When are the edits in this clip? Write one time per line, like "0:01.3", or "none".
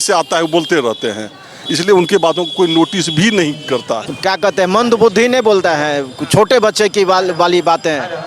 0:04.0

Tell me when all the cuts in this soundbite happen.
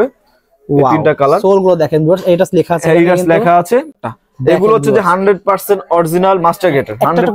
0:03.9

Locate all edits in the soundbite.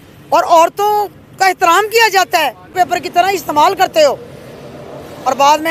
0:02.6

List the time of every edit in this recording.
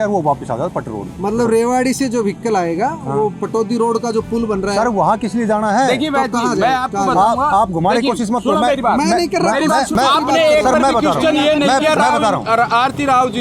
0:09.9

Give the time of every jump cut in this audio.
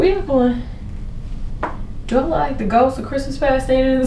none

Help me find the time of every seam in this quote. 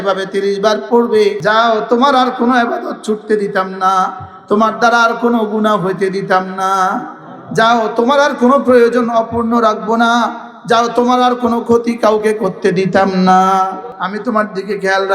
0:01.4
0:13.9

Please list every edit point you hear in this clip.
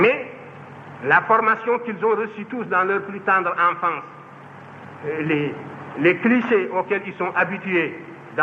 none

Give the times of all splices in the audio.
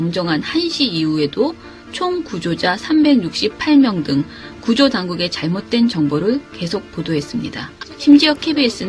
0:04.9

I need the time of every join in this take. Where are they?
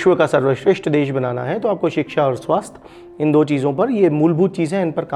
none

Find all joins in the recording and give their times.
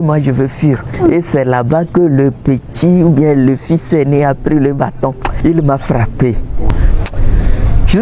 0:00.9
0:05.3
0:06.7

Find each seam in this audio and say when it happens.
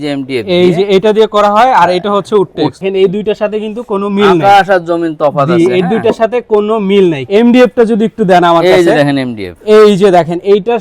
0:02.8
0:07.2

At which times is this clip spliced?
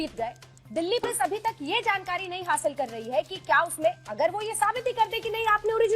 0:01.0

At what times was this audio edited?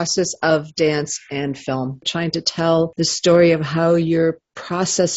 0:02.1

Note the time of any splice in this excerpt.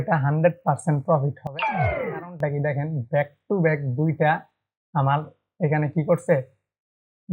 none

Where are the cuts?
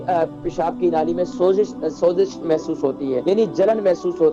0:03.2

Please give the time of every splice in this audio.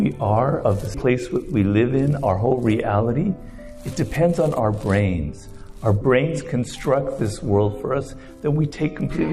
0:00.9
0:06.0

